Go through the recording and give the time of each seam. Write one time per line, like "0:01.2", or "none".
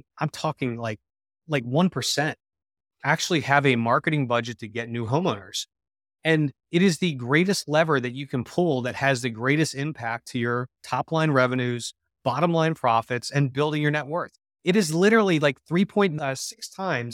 0:16.1